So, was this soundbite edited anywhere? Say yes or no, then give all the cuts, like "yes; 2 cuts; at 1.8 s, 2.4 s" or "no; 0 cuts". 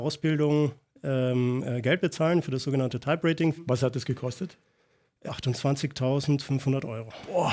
yes; 2 cuts; at 3.7 s, 5.1 s